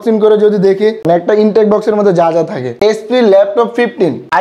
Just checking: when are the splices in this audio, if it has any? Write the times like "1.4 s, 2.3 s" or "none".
2.7 s

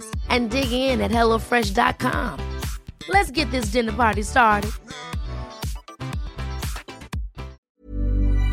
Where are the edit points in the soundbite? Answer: 7.6 s

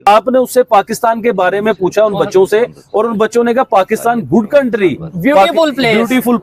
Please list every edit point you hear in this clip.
4.8 s

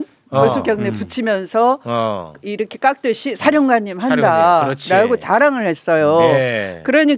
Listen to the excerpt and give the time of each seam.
none

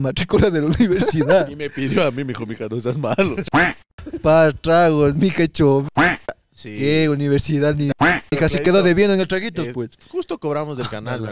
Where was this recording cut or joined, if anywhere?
none

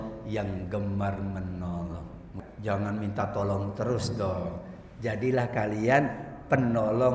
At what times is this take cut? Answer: 2.3 s

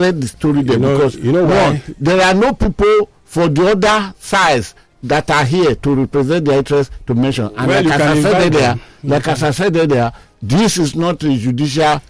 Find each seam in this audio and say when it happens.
none

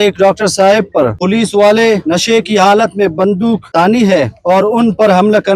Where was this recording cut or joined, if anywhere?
1.2 s, 2.0 s, 3.6 s, 4.4 s

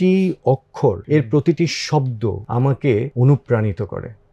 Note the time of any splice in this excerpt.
1.0 s, 2.4 s, 3.1 s

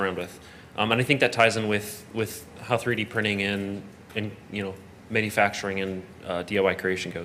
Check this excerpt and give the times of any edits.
none

